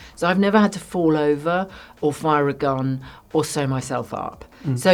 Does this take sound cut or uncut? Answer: uncut